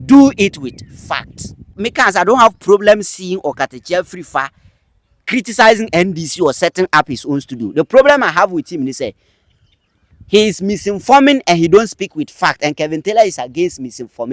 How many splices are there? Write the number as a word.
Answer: one